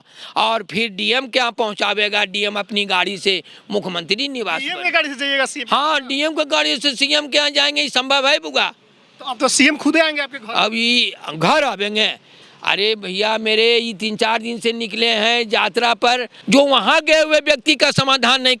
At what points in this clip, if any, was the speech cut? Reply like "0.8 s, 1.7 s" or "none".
16.3 s